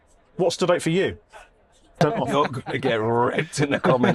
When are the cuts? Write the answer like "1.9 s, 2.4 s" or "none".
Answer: 1.9 s